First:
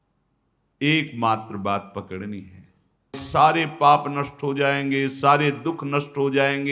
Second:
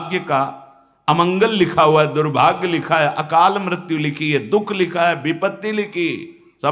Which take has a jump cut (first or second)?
first